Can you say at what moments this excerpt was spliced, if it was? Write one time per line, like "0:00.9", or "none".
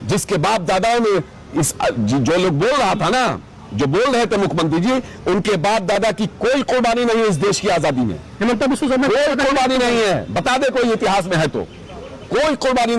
none